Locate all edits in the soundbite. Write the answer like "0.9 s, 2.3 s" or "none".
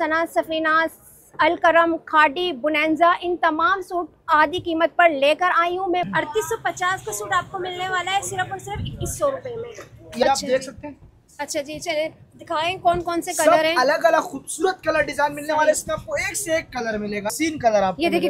6.0 s, 10.2 s, 17.3 s